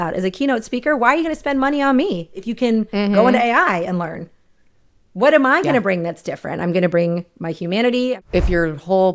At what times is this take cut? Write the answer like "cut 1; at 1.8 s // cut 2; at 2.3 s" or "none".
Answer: cut 1; at 8.2 s

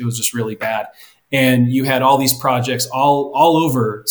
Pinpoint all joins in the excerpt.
none

